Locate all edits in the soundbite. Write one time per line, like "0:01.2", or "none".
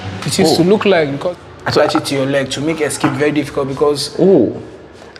0:01.2